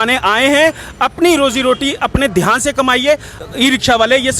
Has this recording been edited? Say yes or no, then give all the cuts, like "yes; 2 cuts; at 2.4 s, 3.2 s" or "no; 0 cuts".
yes; 1 cut; at 3.3 s